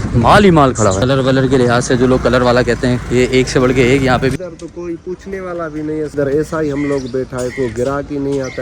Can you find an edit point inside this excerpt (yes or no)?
yes